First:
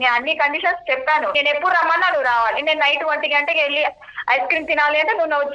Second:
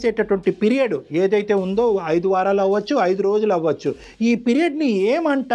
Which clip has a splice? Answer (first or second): first